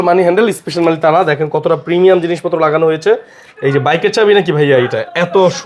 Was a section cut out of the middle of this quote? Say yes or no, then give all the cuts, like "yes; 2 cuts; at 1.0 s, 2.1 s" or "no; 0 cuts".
no; 0 cuts